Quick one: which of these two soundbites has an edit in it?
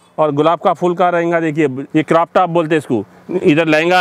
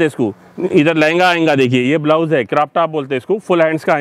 first; 1 cut; at 1.8 s

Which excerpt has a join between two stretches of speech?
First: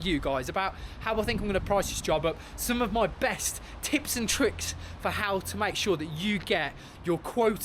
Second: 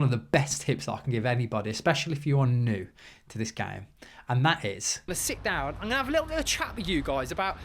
second; 1 cut; at 5.1 s

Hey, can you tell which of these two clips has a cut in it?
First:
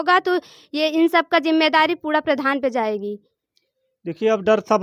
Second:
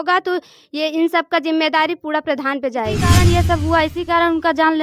second; 1 cut; at 3.2 s

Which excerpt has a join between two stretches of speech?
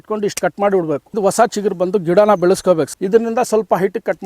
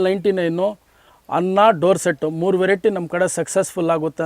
first; 2 cuts; at 1.2 s, 2.9 s

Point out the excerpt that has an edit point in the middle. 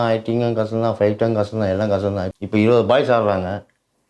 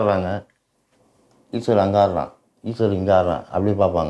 first; 1 cut; at 2.3 s

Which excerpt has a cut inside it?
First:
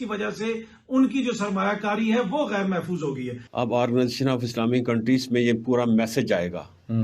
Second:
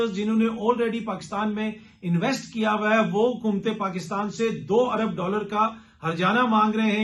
first; 1 cut; at 3.4 s

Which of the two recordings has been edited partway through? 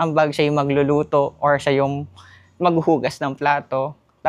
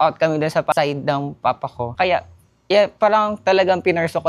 second; 2 cuts; at 0.7 s, 1.8 s

